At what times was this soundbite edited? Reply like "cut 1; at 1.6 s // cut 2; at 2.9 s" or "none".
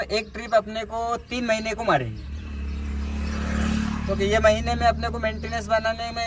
none